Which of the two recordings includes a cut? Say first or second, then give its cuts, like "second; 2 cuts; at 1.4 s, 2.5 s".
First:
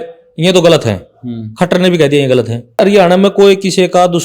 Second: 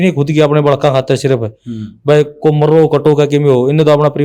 first; 1 cut; at 2.8 s